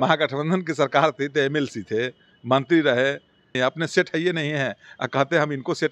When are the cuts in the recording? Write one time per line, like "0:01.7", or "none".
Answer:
0:03.5